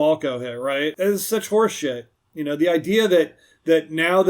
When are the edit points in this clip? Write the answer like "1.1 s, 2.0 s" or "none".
0.9 s